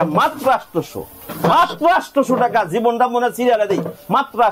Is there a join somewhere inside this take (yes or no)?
no